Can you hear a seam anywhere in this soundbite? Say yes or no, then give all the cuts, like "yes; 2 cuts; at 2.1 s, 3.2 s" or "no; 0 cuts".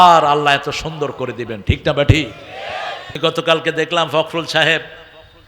yes; 1 cut; at 3.0 s